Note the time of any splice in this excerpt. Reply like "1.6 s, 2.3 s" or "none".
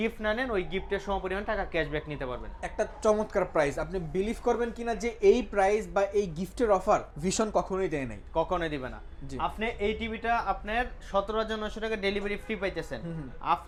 none